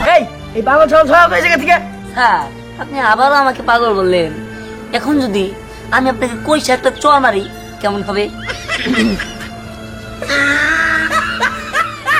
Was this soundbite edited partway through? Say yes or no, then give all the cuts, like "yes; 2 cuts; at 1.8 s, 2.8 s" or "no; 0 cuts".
no; 0 cuts